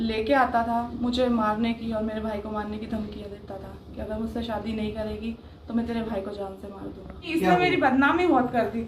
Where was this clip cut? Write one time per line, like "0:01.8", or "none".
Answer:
0:07.3